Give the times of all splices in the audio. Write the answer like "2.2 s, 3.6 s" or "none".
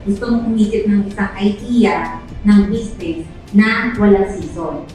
none